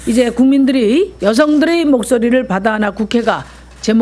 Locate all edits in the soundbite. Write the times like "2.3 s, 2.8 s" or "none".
1.1 s